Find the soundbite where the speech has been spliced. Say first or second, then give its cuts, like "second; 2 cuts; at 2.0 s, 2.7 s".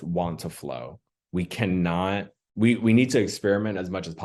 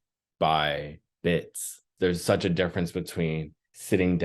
second; 1 cut; at 1.9 s